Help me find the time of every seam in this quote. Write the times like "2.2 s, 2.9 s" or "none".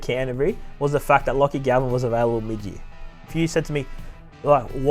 3.3 s